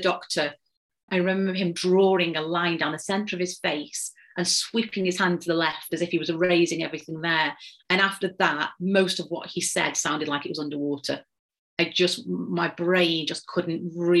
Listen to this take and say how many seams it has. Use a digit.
1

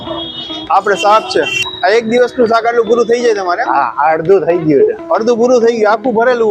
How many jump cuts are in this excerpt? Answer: 1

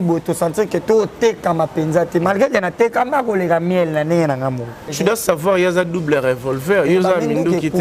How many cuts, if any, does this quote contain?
1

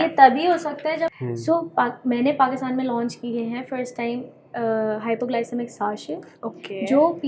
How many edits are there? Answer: 1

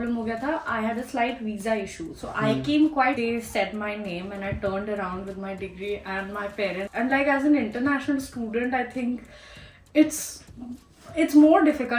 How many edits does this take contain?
2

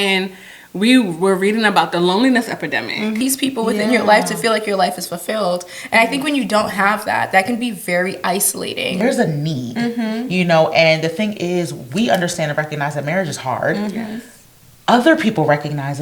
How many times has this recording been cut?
2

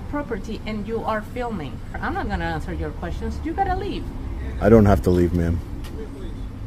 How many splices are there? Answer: 1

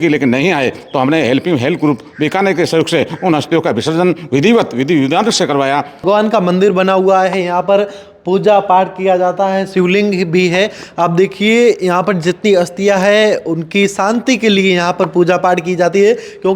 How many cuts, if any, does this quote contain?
1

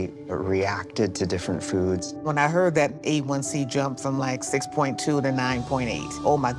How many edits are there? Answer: 0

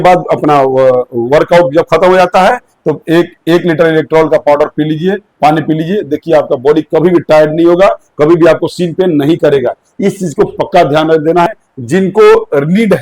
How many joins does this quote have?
1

